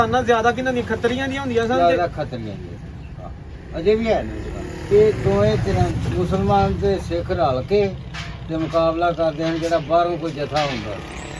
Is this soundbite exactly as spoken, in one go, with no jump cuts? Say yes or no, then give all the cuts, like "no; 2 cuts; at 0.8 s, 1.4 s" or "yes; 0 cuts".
no; 1 cut; at 4.8 s